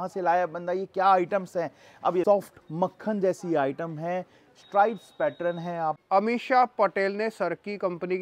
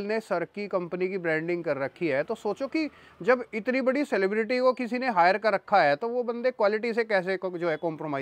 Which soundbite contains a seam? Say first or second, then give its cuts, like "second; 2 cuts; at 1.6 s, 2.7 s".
first; 2 cuts; at 2.2 s, 6.0 s